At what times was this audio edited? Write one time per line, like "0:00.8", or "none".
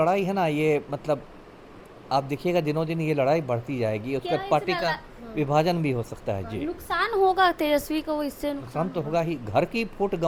none